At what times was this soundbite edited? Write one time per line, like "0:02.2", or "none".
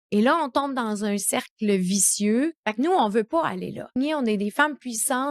0:02.6
0:04.0

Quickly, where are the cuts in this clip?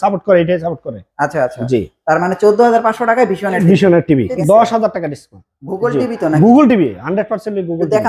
0:04.3

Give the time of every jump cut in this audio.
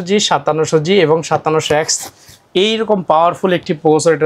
none

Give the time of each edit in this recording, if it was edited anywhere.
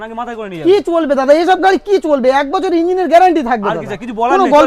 none

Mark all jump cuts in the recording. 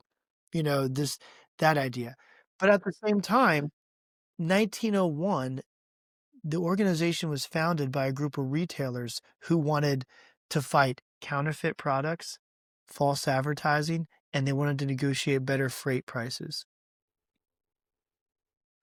none

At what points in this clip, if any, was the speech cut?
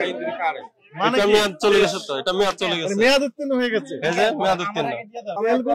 none

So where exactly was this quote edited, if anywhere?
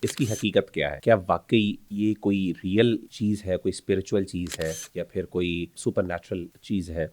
0:01.0
0:01.8
0:03.1
0:04.8
0:06.2

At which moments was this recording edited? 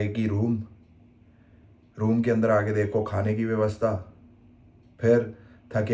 none

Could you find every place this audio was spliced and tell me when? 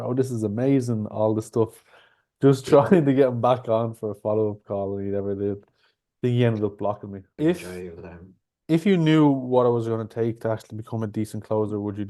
0:07.2

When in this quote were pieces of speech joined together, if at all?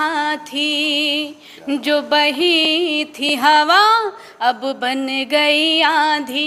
none

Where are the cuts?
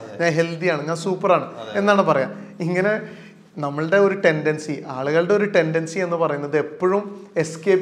none

